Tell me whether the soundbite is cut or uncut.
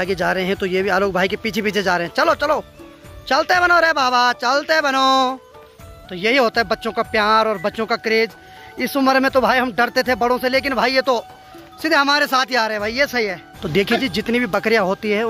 uncut